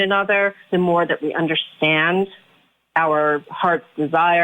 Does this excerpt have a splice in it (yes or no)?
yes